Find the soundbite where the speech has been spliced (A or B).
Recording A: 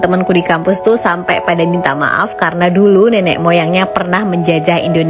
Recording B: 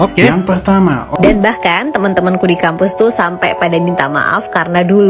B